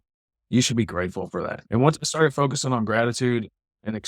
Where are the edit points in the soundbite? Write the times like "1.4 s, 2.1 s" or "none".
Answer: 1.6 s